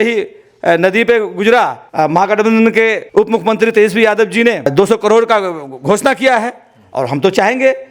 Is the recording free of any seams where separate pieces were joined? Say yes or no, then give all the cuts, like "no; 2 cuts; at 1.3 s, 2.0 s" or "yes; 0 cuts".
no; 3 cuts; at 1.8 s, 3.0 s, 4.7 s